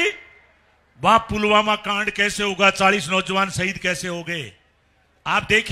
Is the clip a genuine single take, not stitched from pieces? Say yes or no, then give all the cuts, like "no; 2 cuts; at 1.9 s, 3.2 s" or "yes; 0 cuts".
yes; 0 cuts